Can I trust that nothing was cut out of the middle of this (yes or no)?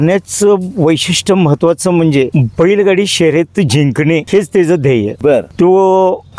yes